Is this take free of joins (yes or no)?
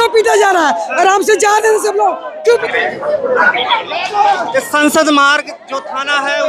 no